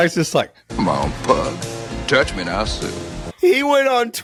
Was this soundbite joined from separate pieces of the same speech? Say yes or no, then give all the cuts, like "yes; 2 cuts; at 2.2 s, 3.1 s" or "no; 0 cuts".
no; 0 cuts